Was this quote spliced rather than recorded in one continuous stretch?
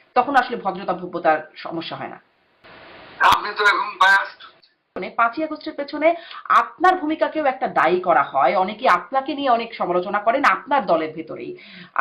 yes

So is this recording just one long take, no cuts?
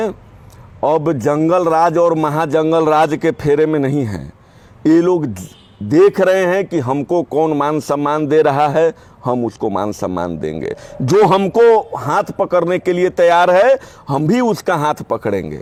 yes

